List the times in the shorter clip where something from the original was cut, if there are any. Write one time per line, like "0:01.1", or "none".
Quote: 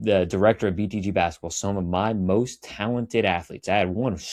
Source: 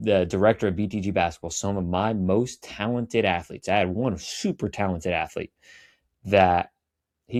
none